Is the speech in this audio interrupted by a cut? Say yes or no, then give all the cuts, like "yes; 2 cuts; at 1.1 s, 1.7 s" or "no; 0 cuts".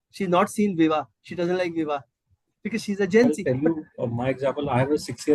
yes; 1 cut; at 3.4 s